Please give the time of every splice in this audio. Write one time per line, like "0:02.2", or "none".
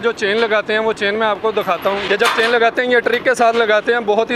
0:02.0